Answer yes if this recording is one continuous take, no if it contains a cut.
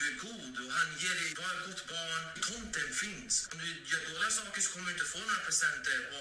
no